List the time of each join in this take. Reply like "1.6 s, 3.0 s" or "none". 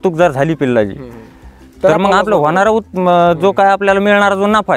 none